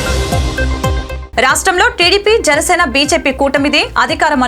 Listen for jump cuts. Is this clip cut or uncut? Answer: uncut